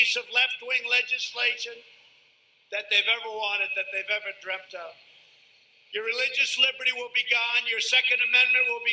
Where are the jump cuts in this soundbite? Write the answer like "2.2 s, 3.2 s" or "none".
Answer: 2.0 s, 7.8 s